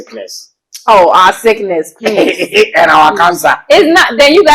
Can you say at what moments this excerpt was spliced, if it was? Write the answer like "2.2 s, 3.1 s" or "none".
none